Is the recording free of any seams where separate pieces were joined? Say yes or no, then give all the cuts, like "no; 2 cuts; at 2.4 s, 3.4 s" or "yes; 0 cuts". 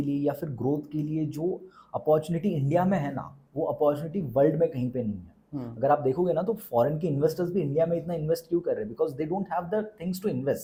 yes; 0 cuts